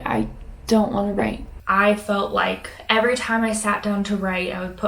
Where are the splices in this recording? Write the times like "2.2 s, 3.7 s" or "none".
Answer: 1.5 s